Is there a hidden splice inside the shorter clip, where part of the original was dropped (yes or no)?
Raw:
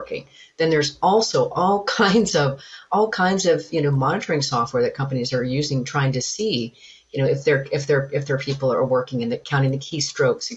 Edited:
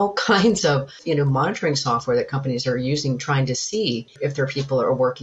yes